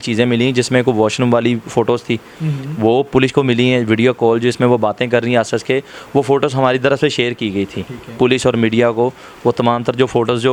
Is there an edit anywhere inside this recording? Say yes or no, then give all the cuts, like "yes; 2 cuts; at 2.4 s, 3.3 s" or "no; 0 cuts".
no; 0 cuts